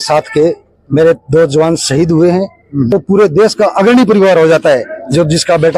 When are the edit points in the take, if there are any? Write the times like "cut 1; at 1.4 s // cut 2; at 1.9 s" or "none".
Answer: cut 1; at 2.9 s